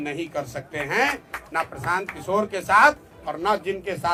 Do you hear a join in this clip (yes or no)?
no